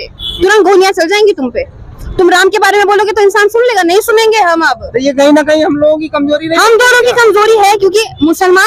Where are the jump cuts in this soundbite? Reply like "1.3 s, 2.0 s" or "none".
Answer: none